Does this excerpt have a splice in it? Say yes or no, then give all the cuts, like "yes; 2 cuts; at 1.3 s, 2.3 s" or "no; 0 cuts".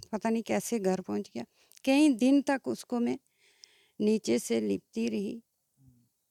no; 0 cuts